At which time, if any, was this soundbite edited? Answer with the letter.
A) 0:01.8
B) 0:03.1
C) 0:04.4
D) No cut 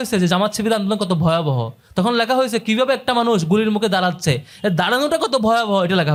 D